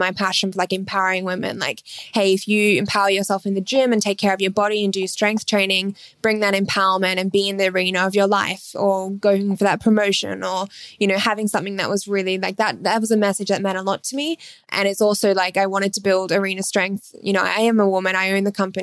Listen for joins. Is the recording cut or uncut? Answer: uncut